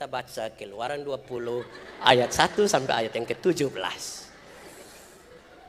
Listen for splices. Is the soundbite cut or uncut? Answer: uncut